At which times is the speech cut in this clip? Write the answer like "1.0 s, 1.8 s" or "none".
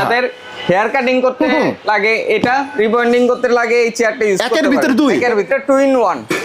5.5 s